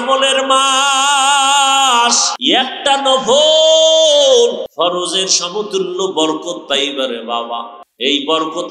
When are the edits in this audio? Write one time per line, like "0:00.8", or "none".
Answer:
0:02.3
0:04.6
0:07.8